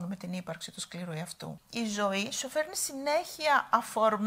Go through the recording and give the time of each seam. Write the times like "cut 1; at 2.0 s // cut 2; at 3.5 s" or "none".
cut 1; at 1.6 s